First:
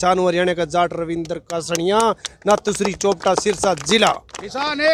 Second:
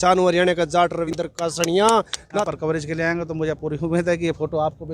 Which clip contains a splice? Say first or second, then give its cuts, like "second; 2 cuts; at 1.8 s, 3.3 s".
second; 2 cuts; at 1.1 s, 2.4 s